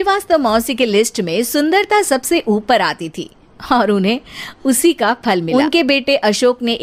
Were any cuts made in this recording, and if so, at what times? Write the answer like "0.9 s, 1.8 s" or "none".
5.5 s

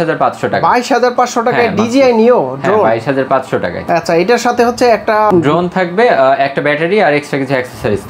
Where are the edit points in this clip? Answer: none

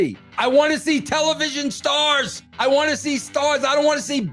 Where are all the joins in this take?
2.4 s

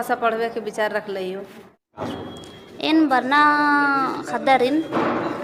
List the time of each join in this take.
1.7 s

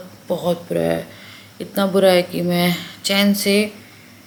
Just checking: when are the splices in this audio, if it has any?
none

